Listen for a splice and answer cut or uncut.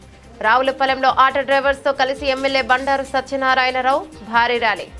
uncut